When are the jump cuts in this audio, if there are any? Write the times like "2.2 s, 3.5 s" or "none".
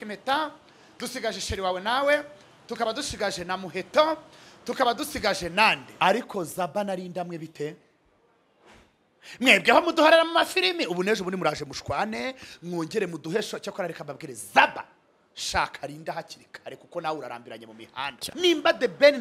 5.9 s, 18.2 s